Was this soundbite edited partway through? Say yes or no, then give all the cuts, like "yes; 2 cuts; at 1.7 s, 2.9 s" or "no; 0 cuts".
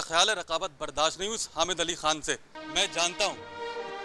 yes; 1 cut; at 2.5 s